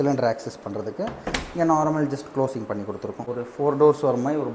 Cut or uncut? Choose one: cut